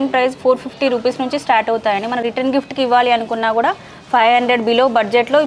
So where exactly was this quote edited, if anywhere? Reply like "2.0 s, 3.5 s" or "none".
none